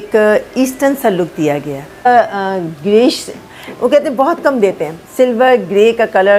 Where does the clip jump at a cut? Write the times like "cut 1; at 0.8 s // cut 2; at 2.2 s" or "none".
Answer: cut 1; at 2.1 s